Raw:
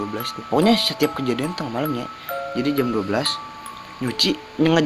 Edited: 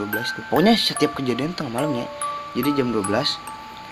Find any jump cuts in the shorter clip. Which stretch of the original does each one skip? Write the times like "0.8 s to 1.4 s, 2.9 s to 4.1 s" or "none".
none